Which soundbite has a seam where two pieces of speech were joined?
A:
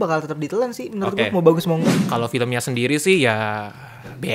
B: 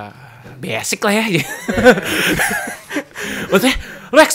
A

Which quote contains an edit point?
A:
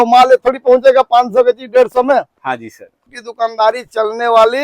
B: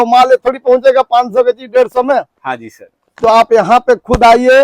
A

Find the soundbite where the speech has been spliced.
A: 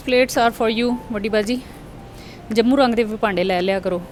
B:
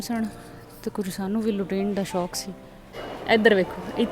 B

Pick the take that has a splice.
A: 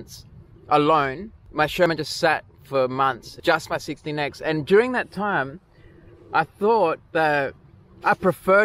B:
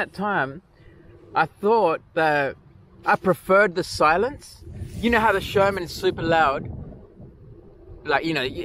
A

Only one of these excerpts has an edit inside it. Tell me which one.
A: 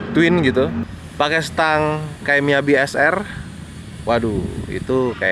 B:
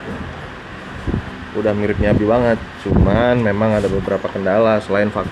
A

